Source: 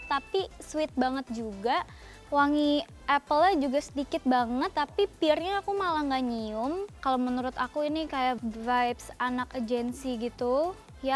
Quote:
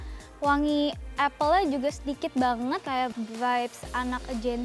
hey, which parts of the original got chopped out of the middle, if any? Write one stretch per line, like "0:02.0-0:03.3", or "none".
0:04.7-0:08.1

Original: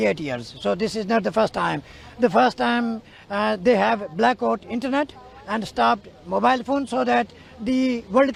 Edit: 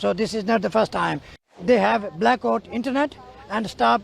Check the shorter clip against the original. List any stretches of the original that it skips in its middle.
0:02.2-0:03.5

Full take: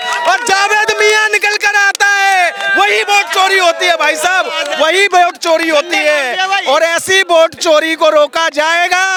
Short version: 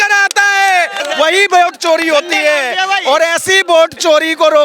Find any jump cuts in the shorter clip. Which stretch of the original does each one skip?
0:02.6-0:04.6

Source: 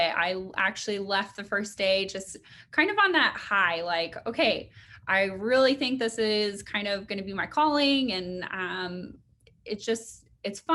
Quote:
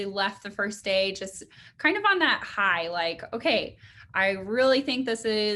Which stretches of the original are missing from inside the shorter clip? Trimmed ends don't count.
none

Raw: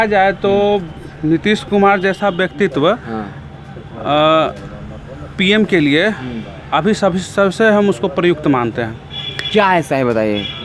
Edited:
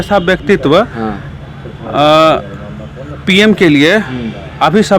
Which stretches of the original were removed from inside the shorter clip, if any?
none

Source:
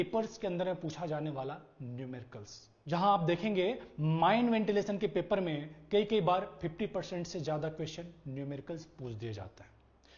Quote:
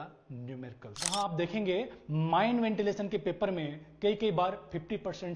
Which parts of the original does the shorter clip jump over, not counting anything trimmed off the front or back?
0:02.6-0:03.0

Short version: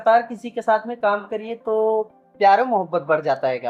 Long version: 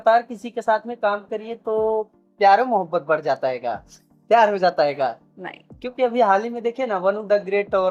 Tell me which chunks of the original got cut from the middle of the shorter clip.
none

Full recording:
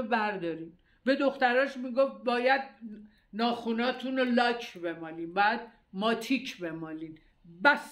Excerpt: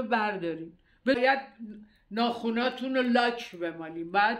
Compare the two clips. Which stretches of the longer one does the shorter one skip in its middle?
0:01.2-0:02.4

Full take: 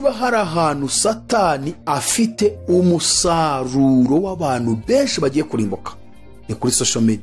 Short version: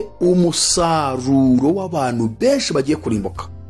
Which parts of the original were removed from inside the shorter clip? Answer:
none

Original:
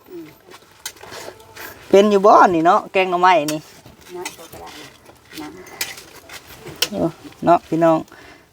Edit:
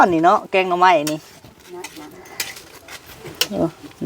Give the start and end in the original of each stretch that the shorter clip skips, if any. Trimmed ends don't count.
0:04.3-0:05.3

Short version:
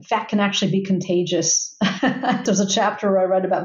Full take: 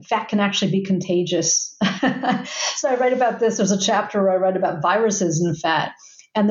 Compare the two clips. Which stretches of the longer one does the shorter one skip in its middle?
0:02.4-0:03.5

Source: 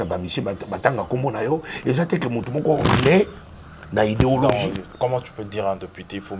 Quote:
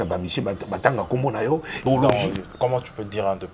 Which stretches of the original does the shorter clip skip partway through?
0:01.9-0:04.2

